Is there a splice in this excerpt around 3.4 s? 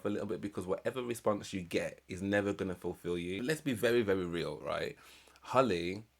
yes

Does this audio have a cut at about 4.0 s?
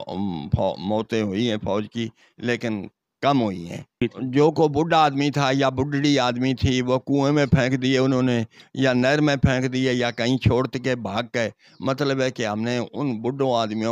yes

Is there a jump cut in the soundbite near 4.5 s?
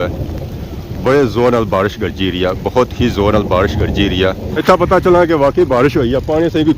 yes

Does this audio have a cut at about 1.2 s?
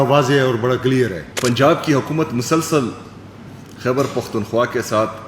yes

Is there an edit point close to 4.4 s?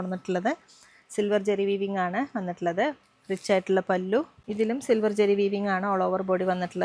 yes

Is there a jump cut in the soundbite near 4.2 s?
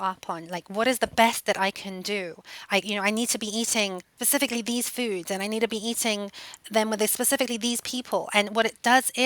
yes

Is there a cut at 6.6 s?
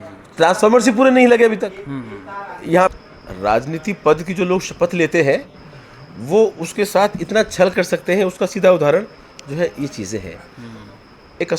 no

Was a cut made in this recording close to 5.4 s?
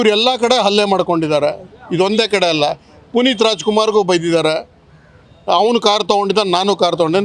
no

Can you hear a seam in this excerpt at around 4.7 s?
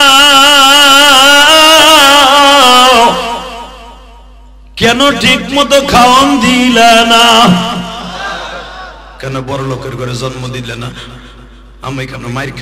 no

